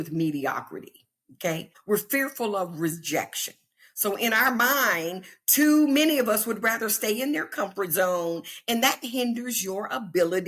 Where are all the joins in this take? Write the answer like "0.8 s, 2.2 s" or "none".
1.7 s

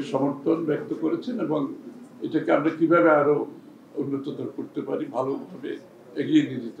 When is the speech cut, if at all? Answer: none

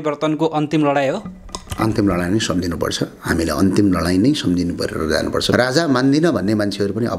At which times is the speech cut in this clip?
5.5 s

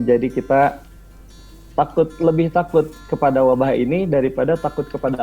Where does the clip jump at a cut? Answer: none

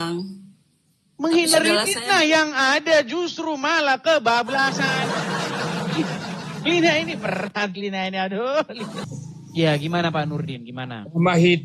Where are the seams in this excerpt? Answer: 9.0 s

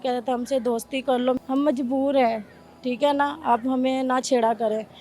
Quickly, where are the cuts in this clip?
1.4 s

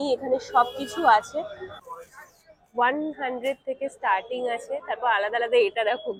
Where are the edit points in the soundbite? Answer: 1.8 s

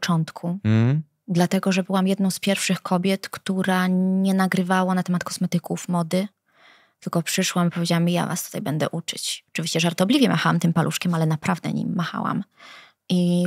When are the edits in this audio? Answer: none

